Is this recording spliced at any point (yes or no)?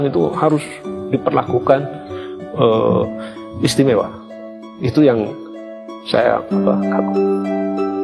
no